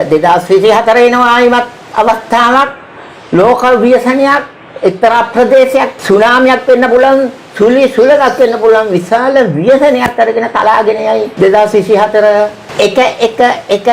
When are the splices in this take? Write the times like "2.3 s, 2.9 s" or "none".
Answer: 6.0 s, 11.3 s, 12.6 s

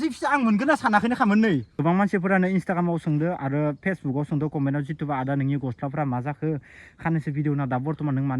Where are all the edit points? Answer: 1.8 s

